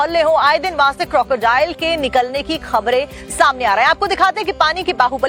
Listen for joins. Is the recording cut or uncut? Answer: uncut